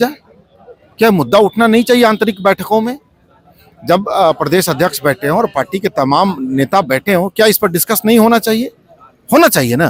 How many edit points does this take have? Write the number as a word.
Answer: zero